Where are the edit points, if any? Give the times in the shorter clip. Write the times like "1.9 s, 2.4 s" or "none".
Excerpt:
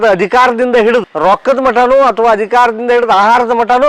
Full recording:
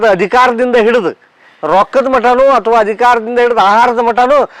1.1 s